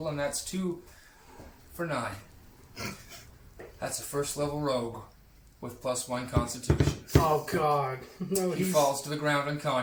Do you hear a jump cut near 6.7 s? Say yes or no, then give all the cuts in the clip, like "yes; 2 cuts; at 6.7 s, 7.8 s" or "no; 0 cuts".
no; 0 cuts